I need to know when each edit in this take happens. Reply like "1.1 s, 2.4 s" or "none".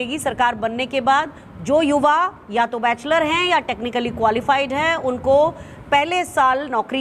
none

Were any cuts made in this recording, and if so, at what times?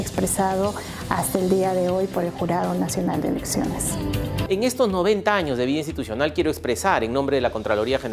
4.4 s

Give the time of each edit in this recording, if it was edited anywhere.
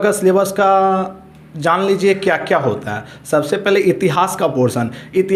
none

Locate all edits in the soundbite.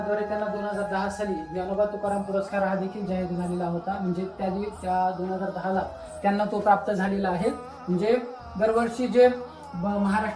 none

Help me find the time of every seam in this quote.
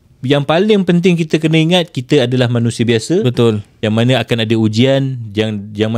none

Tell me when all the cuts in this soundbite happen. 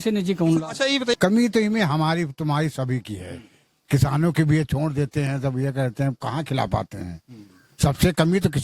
1.1 s

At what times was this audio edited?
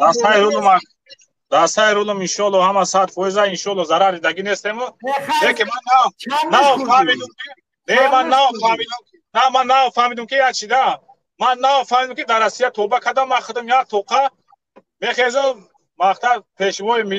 none

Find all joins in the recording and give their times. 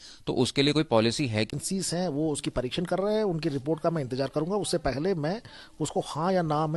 1.5 s

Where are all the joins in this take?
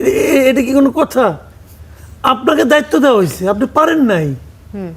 none

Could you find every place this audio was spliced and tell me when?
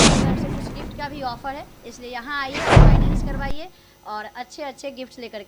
0.9 s, 2.5 s, 3.4 s

